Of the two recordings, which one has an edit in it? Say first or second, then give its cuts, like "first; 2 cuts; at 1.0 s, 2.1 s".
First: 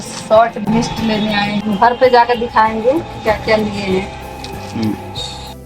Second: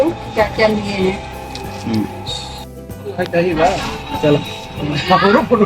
first; 1 cut; at 1.6 s